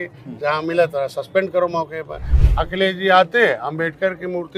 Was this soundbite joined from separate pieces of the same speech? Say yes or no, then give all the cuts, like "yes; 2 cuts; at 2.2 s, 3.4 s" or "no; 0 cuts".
yes; 1 cut; at 2.2 s